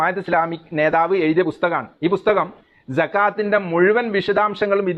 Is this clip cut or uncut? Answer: uncut